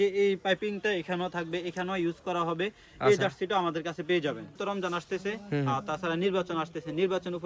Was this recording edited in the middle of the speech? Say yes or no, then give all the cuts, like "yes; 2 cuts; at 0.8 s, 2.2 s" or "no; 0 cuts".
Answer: yes; 1 cut; at 4.6 s